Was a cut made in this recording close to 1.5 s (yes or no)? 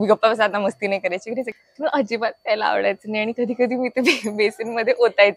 yes